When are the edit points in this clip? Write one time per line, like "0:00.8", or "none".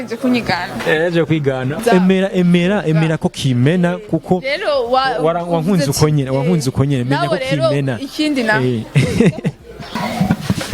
0:01.8